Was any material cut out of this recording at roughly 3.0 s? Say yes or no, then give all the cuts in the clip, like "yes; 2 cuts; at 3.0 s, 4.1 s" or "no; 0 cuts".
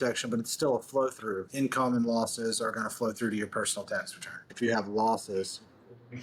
no; 2 cuts; at 1.4 s, 4.5 s